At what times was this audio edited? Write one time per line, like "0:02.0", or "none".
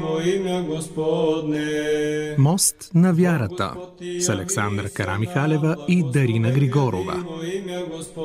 0:02.4
0:07.1

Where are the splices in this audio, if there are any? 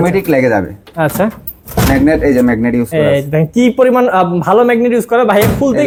none

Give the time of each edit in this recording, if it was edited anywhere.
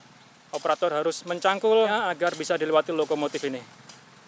0:01.9

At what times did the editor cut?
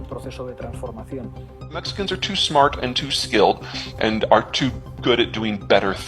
0:01.9

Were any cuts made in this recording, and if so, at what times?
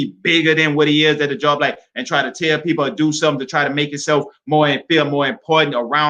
none

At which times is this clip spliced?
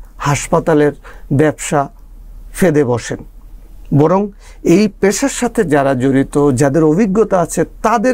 none

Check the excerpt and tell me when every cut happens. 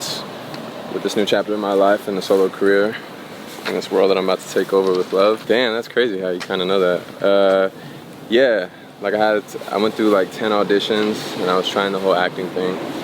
0:05.4

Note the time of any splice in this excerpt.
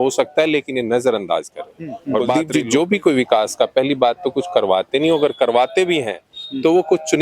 0:02.4

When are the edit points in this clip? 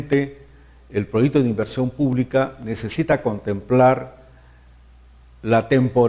0:02.0

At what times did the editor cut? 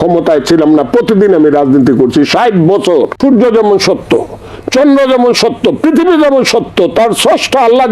0:03.2

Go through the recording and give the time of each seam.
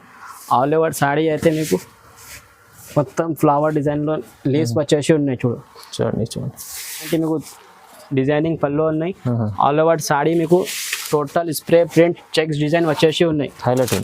0:07.1

